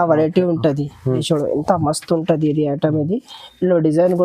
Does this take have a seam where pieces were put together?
yes; 1 cut; at 1.2 s

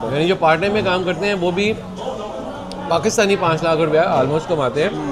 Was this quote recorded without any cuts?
yes; 0 cuts

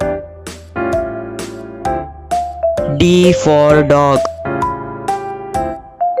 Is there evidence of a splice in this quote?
no; 0 cuts

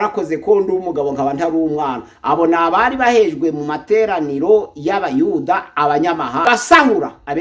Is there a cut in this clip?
yes; 1 cut; at 6.5 s

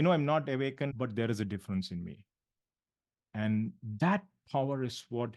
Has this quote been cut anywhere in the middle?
yes; 1 cut; at 0.9 s

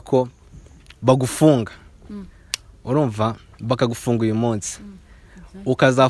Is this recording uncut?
yes; 0 cuts

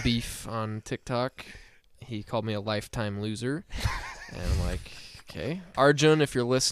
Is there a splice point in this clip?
yes; 1 cut; at 5.7 s

